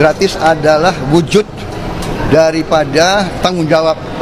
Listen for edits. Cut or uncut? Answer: uncut